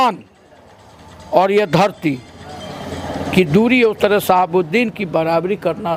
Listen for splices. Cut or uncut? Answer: uncut